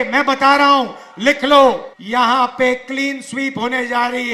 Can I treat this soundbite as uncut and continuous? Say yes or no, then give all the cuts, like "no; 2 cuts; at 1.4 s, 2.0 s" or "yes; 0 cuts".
no; 1 cut; at 1.9 s